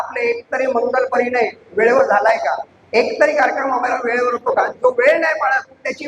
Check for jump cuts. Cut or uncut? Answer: cut